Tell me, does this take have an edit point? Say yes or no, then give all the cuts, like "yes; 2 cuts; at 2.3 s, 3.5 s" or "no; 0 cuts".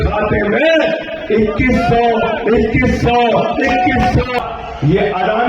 yes; 1 cut; at 4.4 s